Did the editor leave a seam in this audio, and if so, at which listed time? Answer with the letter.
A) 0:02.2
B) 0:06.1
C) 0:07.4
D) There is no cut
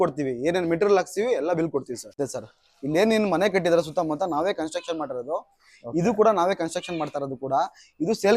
A